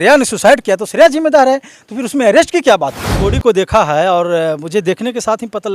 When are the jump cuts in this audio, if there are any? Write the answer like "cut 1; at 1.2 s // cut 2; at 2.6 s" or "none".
cut 1; at 3.2 s